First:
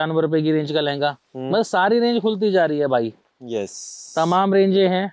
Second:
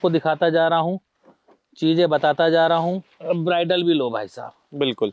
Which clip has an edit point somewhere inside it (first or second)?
second